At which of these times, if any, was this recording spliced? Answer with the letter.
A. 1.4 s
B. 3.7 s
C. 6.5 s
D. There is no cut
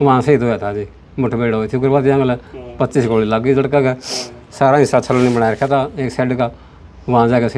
D